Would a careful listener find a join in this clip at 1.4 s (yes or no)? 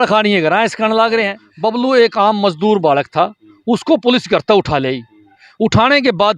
yes